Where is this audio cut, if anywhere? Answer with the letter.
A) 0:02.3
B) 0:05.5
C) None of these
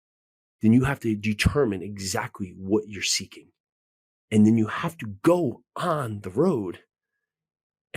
C